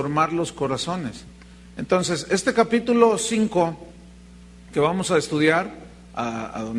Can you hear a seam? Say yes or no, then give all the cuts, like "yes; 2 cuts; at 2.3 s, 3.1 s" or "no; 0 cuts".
yes; 1 cut; at 1.6 s